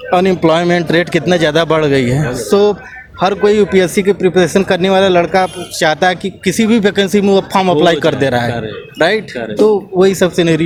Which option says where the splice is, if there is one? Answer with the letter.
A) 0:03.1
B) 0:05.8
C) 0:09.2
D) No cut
D